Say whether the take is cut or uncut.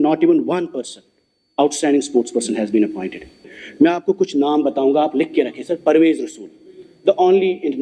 cut